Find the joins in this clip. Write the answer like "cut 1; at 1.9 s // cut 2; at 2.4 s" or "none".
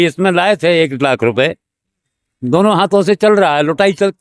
none